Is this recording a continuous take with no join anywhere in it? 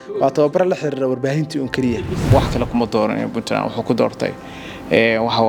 no; 1 cut; at 2.3 s

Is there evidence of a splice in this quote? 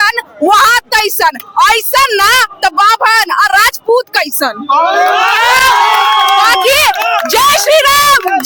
no; 0 cuts

